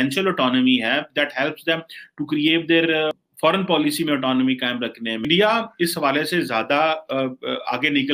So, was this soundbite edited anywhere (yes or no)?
yes